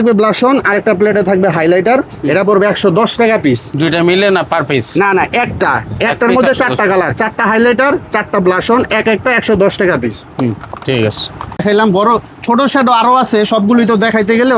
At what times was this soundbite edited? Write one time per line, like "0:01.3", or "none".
none